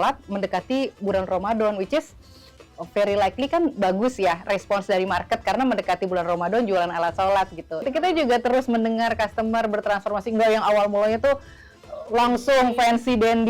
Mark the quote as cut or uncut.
cut